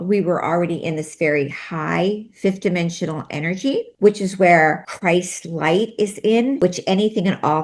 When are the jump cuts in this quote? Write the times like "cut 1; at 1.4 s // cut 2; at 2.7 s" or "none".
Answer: cut 1; at 3.9 s // cut 2; at 4.9 s // cut 3; at 6.6 s